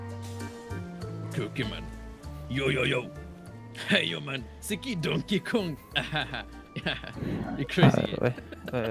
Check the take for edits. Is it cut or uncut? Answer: uncut